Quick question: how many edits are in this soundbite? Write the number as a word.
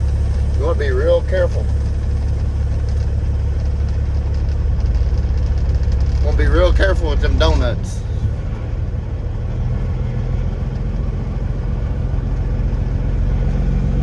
zero